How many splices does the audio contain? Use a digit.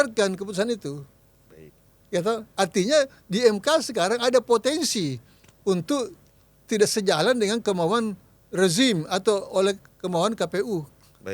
0